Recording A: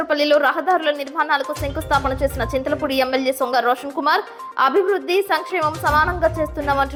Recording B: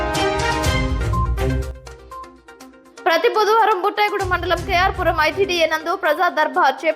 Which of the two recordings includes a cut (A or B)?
B